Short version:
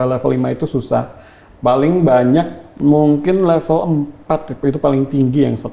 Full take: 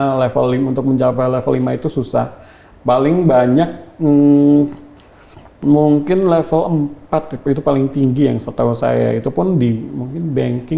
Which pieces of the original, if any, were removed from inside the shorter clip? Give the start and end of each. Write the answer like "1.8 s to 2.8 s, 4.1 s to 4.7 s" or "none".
3.8 s to 5.4 s